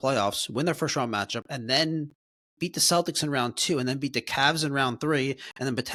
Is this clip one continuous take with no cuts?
yes; 0 cuts

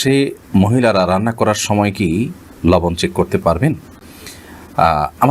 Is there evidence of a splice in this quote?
no; 0 cuts

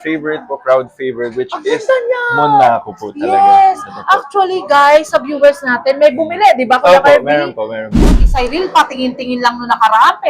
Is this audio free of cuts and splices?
no; 1 cut; at 8.2 s

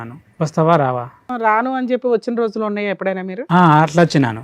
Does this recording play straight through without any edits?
no; 1 cut; at 1.3 s

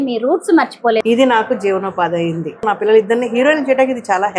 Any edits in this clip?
yes; 2 cuts; at 1.0 s, 2.6 s

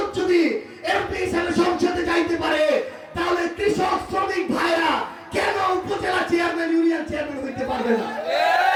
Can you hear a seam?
no; 0 cuts

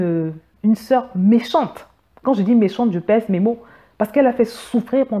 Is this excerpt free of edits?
yes; 0 cuts

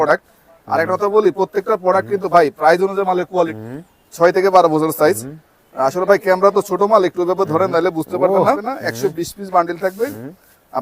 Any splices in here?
yes; 2 cuts; at 3.5 s, 8.6 s

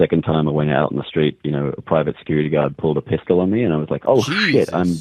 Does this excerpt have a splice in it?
no; 0 cuts

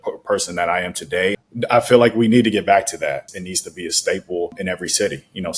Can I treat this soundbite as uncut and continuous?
no; 3 cuts; at 1.4 s, 3.3 s, 4.6 s

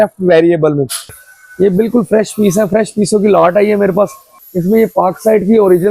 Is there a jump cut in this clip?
yes; 2 cuts; at 1.3 s, 4.3 s

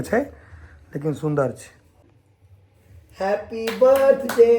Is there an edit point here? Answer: yes; 1 cut; at 2.0 s

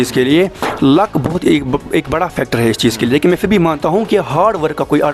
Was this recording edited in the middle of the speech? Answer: no; 0 cuts

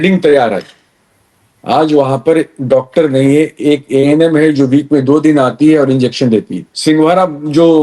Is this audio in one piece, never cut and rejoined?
no; 1 cut; at 6.6 s

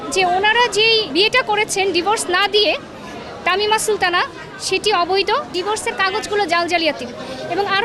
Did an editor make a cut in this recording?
yes; 2 cuts; at 1.1 s, 5.5 s

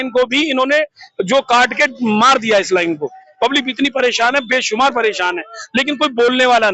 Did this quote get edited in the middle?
no; 0 cuts

